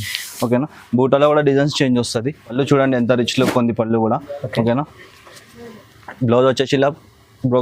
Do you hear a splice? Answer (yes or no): yes